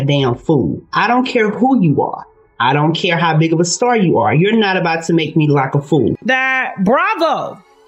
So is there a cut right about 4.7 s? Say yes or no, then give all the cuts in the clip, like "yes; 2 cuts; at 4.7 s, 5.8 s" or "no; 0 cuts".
no; 1 cut; at 6.0 s